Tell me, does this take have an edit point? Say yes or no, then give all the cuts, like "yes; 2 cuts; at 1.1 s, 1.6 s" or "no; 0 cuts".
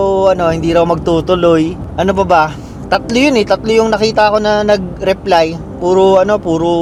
no; 0 cuts